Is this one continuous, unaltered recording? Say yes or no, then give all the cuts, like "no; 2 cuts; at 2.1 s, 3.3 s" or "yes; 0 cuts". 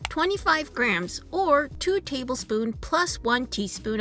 yes; 0 cuts